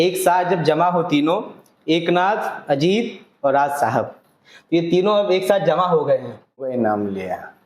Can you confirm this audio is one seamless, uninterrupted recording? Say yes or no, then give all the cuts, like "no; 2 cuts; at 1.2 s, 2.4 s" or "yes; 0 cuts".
no; 1 cut; at 6.7 s